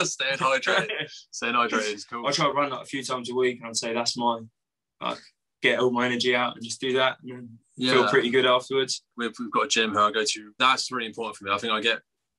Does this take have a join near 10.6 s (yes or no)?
yes